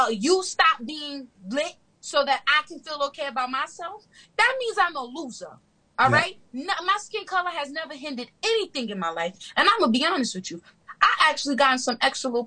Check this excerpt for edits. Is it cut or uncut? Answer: uncut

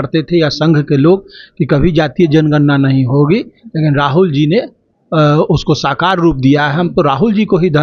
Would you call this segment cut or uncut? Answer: uncut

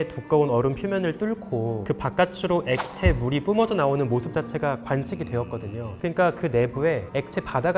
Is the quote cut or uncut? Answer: uncut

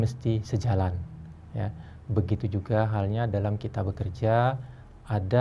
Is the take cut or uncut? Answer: uncut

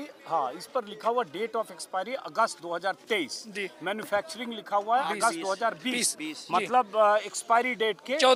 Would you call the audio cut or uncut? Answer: uncut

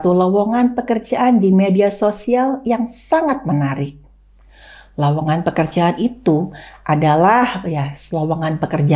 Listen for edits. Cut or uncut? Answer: uncut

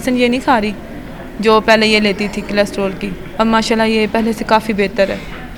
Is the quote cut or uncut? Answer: uncut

